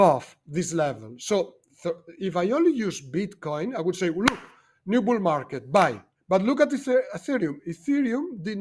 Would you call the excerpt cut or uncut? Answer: uncut